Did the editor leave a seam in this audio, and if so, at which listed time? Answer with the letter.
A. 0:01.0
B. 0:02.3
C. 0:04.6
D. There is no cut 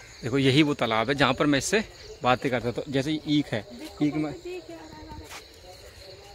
D